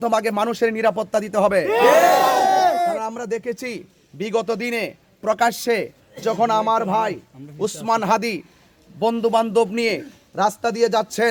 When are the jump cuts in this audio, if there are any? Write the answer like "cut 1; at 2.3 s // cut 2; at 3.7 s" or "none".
none